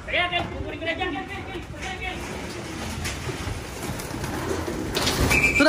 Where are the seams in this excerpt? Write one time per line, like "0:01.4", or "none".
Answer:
none